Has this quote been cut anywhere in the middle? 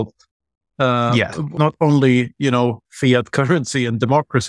yes; 1 cut; at 1.5 s

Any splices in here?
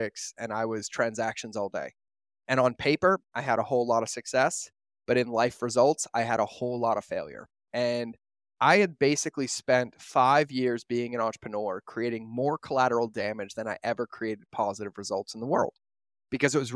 no; 0 cuts

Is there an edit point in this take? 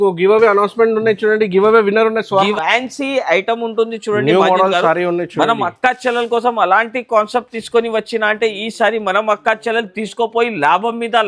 yes; 1 cut; at 2.4 s

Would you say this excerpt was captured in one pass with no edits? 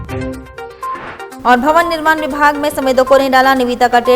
yes; 0 cuts

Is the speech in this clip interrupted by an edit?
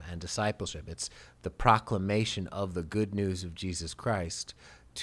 no; 0 cuts

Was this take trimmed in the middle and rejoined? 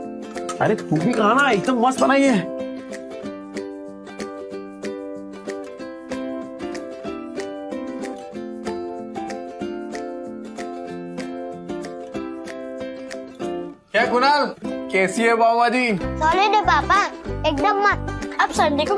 no; 0 cuts

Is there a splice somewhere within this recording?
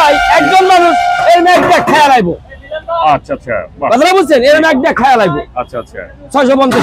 no; 0 cuts

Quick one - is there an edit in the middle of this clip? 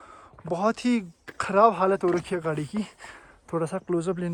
no; 0 cuts

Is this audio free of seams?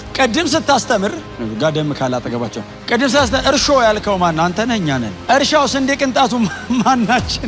no; 3 cuts; at 1.3 s, 2.7 s, 5.1 s

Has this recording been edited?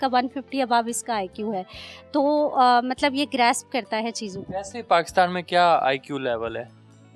no; 0 cuts

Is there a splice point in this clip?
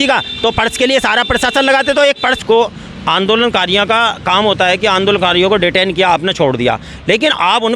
yes; 1 cut; at 2.4 s

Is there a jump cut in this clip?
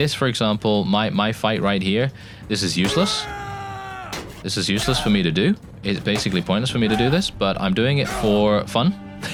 no; 0 cuts

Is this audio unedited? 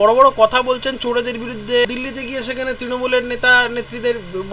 no; 1 cut; at 1.8 s

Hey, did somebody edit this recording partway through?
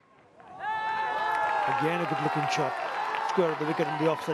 no; 0 cuts

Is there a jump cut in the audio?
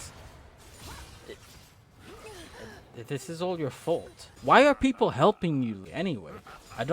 yes; 2 cuts; at 4.4 s, 5.8 s

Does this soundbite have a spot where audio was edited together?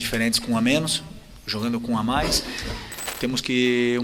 yes; 1 cut; at 3.0 s

